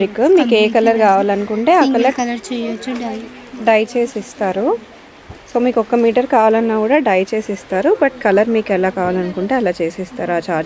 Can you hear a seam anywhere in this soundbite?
no; 0 cuts

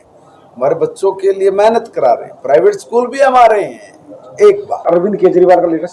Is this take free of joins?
no; 2 cuts; at 2.7 s, 4.8 s

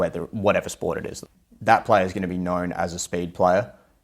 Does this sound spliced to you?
yes; 1 cut; at 1.2 s

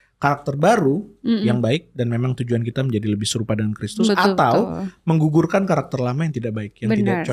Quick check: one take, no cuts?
yes; 0 cuts

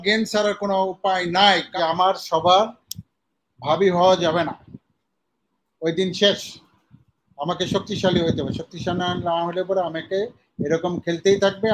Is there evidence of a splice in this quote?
yes; 1 cut; at 1.7 s

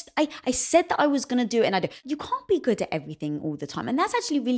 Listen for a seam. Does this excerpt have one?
yes; 1 cut; at 2.0 s

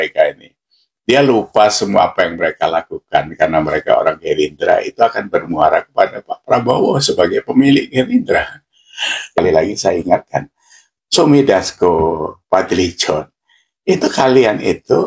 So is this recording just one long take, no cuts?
no; 1 cut; at 9.4 s

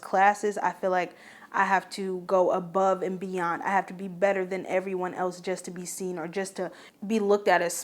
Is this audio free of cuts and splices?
no; 1 cut; at 6.8 s

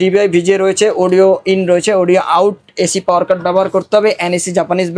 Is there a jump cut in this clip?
no; 0 cuts

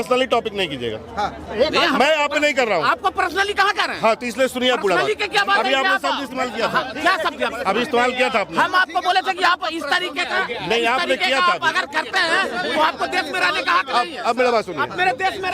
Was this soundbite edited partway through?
no; 0 cuts

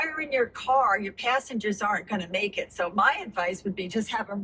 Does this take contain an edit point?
no; 0 cuts

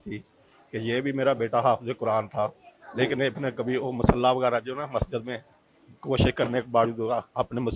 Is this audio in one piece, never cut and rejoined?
yes; 0 cuts

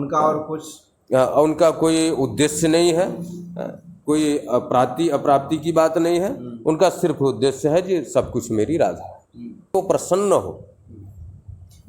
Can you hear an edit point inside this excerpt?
yes; 1 cut; at 9.7 s

